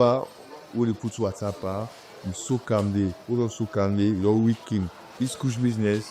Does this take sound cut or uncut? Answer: cut